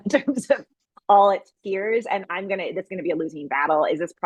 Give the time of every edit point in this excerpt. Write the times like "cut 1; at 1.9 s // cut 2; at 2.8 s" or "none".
none